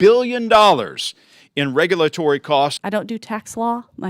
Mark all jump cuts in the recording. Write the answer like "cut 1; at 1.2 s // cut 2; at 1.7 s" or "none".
cut 1; at 2.8 s